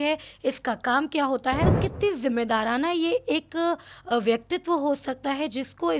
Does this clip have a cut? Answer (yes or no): yes